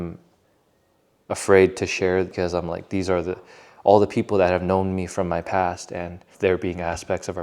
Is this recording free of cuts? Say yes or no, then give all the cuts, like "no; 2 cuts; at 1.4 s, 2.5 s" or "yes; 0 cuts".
no; 2 cuts; at 2.3 s, 6.3 s